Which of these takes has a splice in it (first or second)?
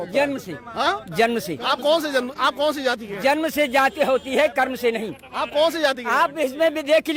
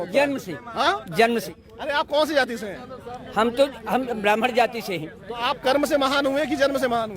second